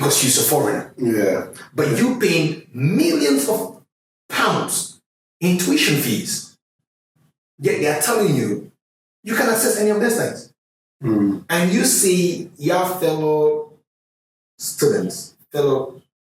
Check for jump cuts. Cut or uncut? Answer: uncut